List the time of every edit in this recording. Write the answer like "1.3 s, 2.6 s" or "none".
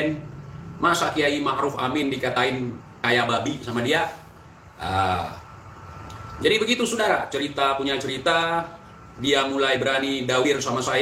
none